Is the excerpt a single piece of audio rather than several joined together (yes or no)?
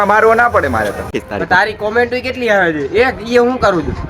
no